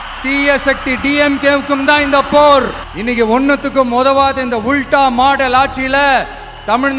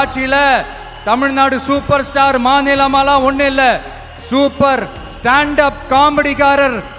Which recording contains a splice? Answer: first; 1 cut; at 2.8 s

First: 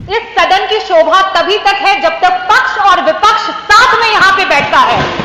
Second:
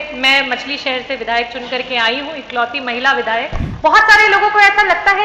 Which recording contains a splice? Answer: second; 1 cut; at 3.6 s

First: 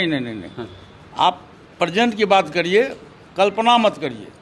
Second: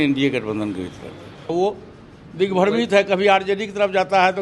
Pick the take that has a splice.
second; 1 cut; at 1.5 s

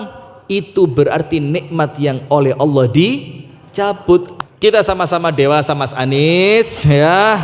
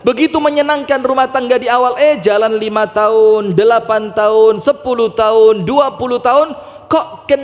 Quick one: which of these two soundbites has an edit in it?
first; 1 cut; at 4.3 s

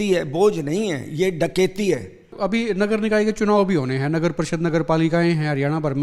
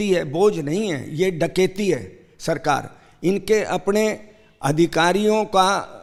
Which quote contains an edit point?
first; 1 cut; at 2.3 s

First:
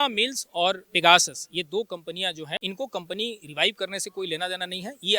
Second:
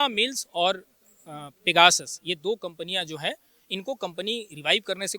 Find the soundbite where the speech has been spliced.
first; 2 cuts; at 0.9 s, 2.6 s

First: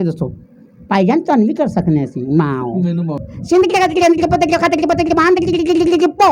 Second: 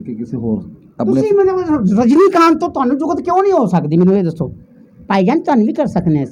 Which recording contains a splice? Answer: first; 1 cut; at 3.2 s

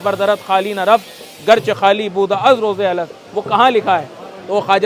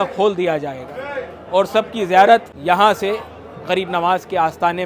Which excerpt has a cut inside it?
second; 1 cut; at 2.5 s

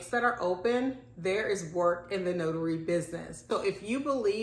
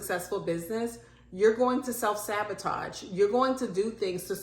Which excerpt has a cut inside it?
first; 1 cut; at 3.4 s

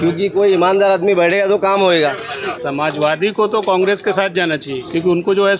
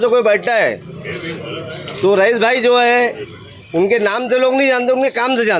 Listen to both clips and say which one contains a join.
first; 1 cut; at 2.5 s

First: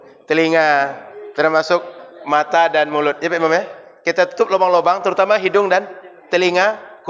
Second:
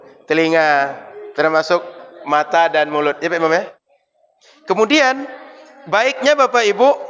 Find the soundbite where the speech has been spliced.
second; 1 cut; at 3.8 s

